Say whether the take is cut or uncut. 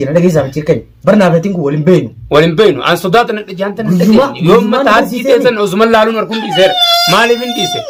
uncut